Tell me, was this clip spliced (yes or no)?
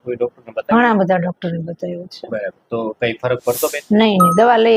no